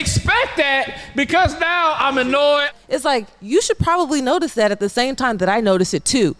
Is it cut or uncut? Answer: cut